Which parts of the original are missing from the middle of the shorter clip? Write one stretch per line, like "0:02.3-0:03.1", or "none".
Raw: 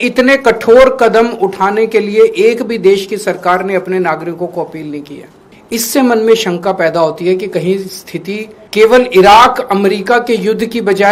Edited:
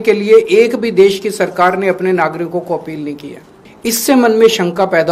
none